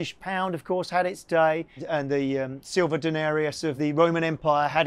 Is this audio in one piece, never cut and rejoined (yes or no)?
no